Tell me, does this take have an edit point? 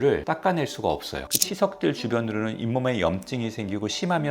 yes; 1 cut; at 1.3 s

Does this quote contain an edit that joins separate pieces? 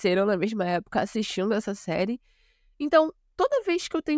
no; 0 cuts

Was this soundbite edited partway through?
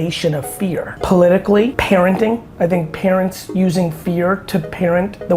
yes; 3 cuts; at 0.9 s, 1.8 s, 2.5 s

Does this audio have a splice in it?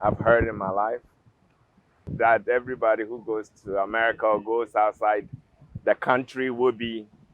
yes; 1 cut; at 2.1 s

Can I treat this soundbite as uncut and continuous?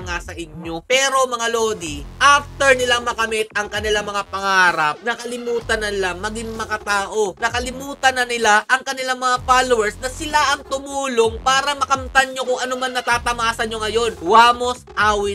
yes; 0 cuts

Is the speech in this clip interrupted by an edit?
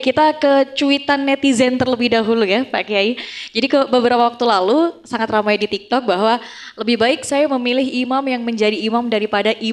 no; 0 cuts

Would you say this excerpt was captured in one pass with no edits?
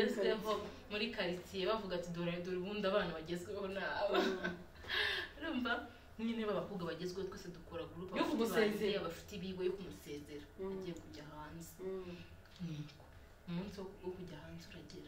yes; 0 cuts

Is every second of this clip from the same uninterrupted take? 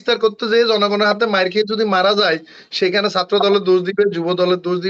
yes; 0 cuts

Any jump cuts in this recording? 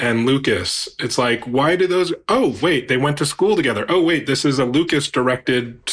no; 0 cuts

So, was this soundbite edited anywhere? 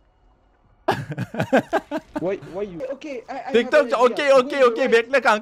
yes; 1 cut; at 2.7 s

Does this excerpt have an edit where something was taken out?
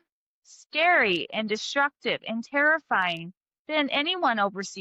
no; 0 cuts

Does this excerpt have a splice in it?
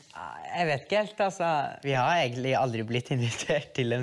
yes; 1 cut; at 1.8 s

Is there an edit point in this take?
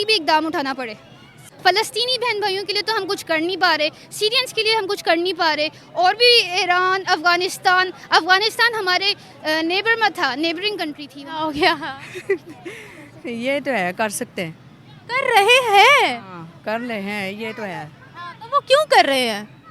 yes; 2 cuts; at 1.4 s, 11.1 s

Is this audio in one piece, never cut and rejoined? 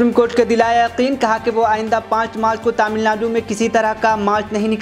yes; 0 cuts

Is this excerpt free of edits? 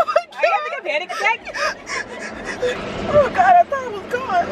no; 1 cut; at 2.8 s

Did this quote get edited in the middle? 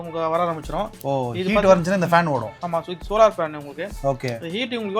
no; 0 cuts

